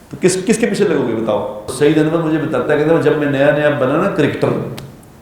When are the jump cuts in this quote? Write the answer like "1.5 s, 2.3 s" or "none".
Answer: 1.6 s